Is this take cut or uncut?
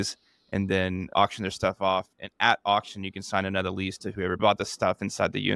cut